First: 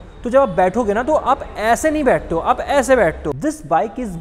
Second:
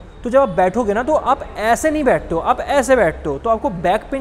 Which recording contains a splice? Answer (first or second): first